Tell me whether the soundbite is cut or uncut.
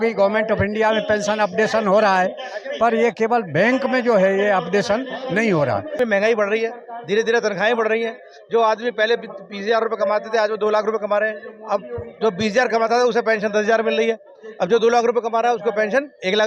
cut